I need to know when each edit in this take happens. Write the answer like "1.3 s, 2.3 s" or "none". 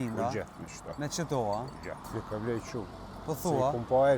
2.2 s